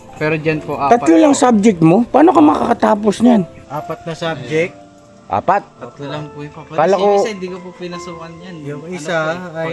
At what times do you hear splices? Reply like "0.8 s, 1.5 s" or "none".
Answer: 3.6 s